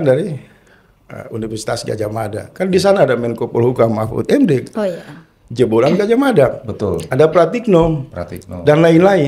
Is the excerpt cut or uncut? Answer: uncut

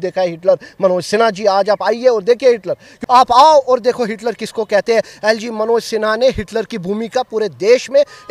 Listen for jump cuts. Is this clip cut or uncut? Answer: cut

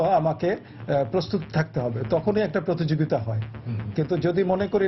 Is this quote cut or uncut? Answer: uncut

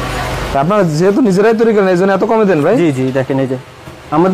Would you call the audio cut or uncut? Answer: uncut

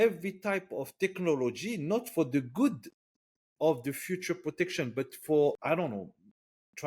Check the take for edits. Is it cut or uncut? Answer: cut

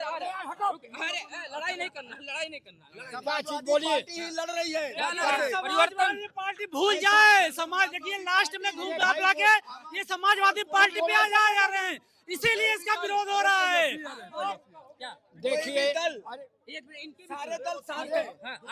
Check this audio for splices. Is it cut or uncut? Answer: uncut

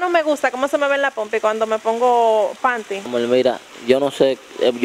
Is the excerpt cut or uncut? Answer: cut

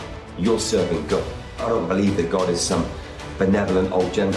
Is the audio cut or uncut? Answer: cut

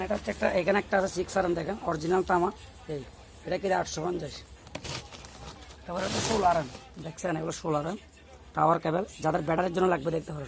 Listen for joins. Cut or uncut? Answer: uncut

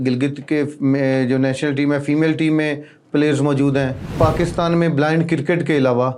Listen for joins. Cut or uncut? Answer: cut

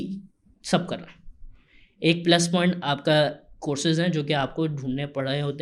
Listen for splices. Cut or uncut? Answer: uncut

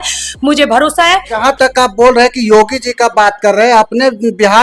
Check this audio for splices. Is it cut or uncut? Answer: uncut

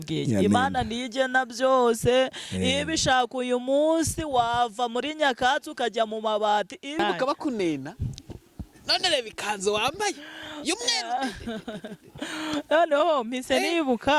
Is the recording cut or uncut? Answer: cut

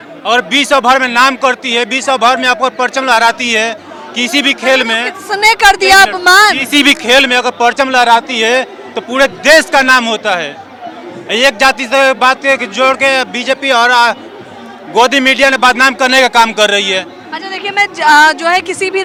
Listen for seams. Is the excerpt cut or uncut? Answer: uncut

